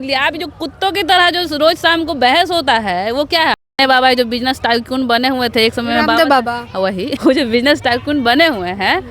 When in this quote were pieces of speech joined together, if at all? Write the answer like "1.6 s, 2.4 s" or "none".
3.5 s, 7.2 s